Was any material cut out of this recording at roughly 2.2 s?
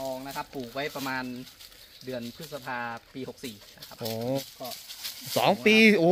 no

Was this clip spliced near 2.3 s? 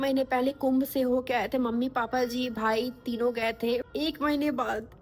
no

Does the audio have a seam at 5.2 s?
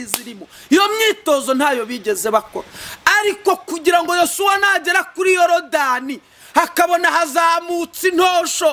no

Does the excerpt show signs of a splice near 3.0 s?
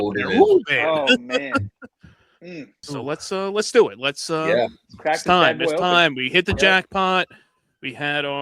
yes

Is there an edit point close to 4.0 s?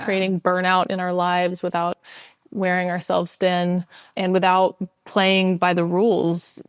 yes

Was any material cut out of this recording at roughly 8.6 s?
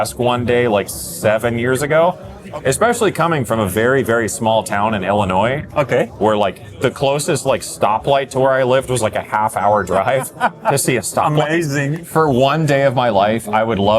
no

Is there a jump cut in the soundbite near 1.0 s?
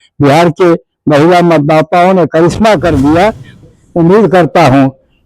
no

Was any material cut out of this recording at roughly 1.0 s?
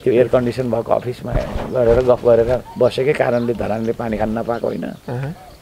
no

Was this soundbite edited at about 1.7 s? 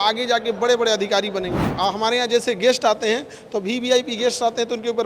yes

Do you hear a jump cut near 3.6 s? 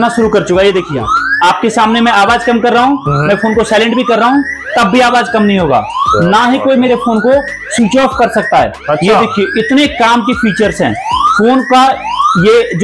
no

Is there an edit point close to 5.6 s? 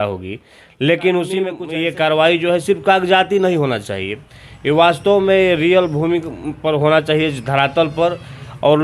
no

